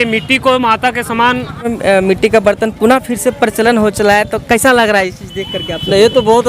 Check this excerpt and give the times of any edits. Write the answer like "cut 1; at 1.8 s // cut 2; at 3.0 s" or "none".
cut 1; at 1.7 s